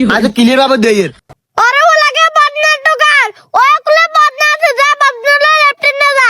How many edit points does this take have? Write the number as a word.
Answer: one